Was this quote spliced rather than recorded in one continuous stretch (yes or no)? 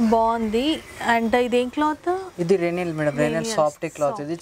no